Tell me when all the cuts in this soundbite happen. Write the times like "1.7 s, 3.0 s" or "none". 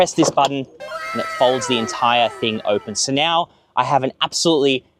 none